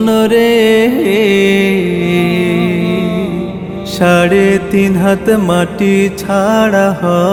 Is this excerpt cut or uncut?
uncut